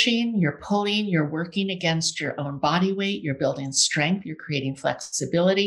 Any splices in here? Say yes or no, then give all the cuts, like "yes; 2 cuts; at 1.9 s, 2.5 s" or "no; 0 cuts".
no; 0 cuts